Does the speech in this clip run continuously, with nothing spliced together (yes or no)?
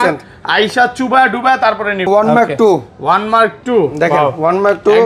no